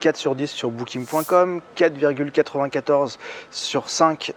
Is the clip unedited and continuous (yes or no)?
yes